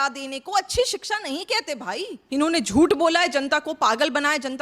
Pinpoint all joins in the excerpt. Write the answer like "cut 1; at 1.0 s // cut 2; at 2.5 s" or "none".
cut 1; at 2.2 s